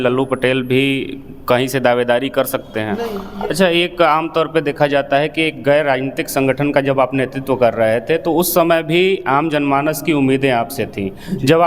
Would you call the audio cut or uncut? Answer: cut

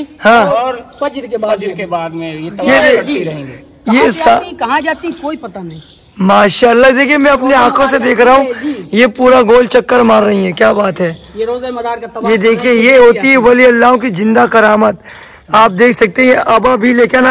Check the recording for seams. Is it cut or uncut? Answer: uncut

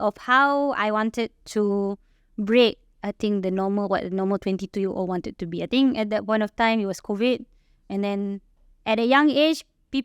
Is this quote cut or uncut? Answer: uncut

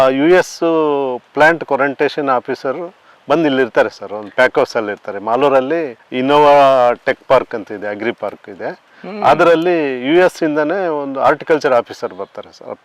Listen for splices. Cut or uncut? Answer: cut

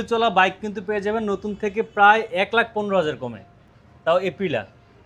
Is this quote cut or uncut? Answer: uncut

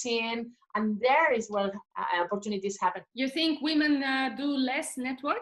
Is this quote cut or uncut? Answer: cut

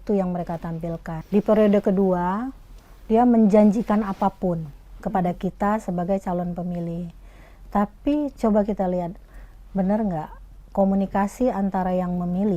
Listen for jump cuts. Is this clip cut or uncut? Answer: cut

